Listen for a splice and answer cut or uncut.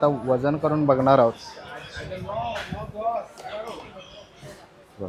uncut